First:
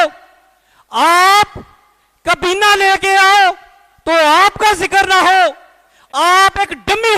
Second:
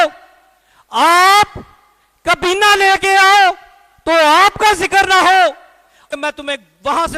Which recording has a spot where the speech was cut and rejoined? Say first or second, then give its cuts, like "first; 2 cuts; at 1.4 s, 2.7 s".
second; 1 cut; at 6.1 s